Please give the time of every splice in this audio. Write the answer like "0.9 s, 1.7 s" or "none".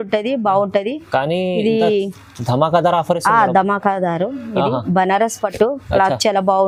none